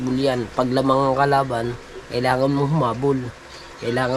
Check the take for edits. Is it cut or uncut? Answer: uncut